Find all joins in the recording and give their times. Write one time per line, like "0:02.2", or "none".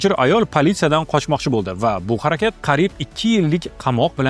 0:02.6